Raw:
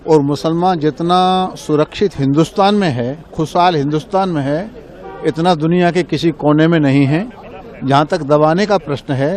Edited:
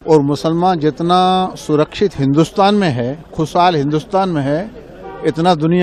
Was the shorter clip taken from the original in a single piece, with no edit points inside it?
yes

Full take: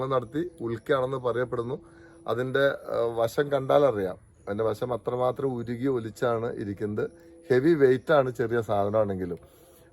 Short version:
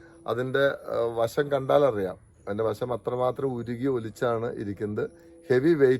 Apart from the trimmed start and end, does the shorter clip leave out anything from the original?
no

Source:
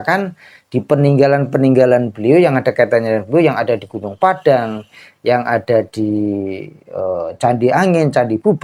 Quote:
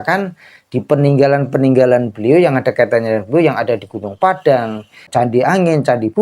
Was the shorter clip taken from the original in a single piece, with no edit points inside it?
no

